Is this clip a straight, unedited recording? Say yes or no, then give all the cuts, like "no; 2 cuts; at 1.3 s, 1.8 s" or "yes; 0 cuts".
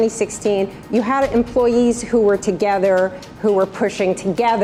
yes; 0 cuts